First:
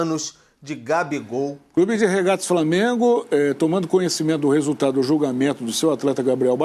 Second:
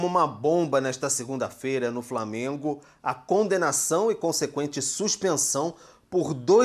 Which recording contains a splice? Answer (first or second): first